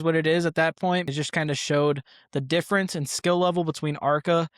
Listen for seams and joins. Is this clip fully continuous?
no; 1 cut; at 1.1 s

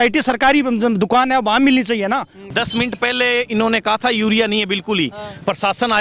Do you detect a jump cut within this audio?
yes; 1 cut; at 2.4 s

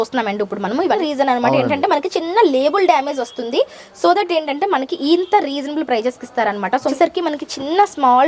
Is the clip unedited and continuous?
no; 2 cuts; at 1.0 s, 6.9 s

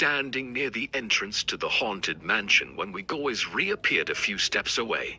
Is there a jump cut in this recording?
yes; 1 cut; at 3.1 s

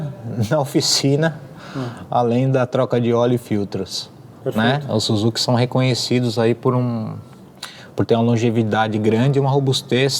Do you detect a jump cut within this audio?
no; 0 cuts

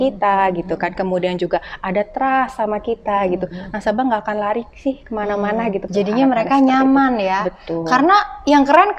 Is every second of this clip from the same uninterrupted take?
no; 1 cut; at 5.9 s

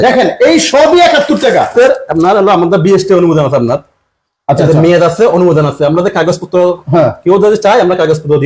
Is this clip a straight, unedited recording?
no; 1 cut; at 1.7 s

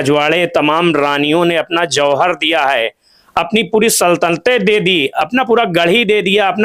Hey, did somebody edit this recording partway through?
no; 0 cuts

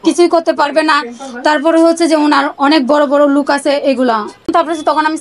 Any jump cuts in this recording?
yes; 1 cut; at 4.3 s

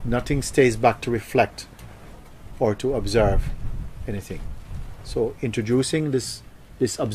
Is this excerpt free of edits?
no; 1 cut; at 4.2 s

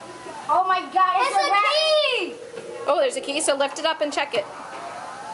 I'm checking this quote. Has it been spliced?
no; 0 cuts

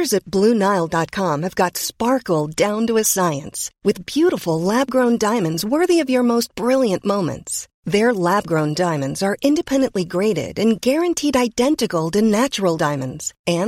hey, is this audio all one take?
yes; 0 cuts

